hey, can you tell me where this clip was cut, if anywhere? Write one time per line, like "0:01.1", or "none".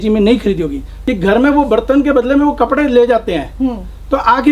0:00.9